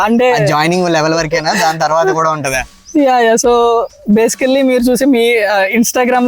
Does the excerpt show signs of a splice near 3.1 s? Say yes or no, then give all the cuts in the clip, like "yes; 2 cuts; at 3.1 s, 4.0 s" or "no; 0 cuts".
no; 0 cuts